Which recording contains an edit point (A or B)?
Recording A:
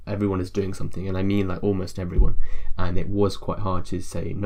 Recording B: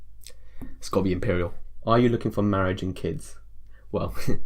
B